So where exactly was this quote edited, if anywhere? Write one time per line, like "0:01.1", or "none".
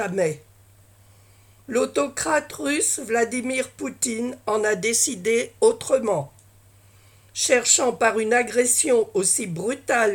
none